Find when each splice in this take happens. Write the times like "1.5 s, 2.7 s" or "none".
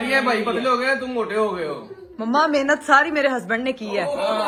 none

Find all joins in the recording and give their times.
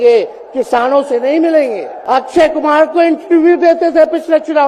1.9 s

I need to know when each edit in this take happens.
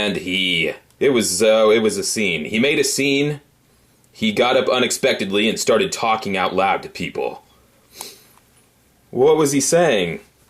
4.3 s

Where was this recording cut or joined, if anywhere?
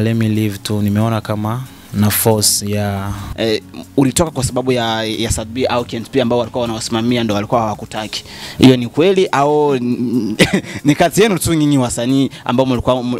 3.3 s

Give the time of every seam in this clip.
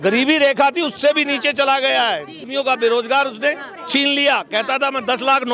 2.5 s

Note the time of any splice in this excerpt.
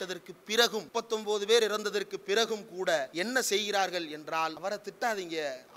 0.9 s, 3.1 s, 4.6 s

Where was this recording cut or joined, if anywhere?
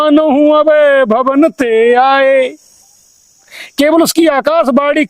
none

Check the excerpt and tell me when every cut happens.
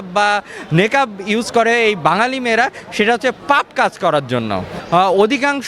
4.7 s

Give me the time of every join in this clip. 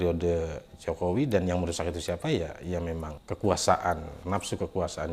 3.1 s, 4.1 s

